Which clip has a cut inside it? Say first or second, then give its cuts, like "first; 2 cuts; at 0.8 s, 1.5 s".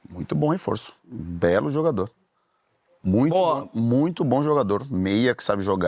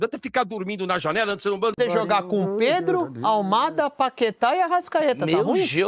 second; 1 cut; at 1.8 s